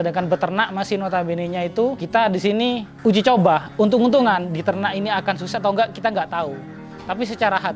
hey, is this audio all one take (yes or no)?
no